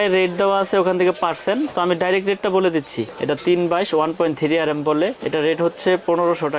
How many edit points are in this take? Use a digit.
1